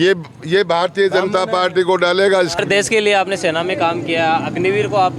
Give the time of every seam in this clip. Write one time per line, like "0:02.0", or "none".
0:02.6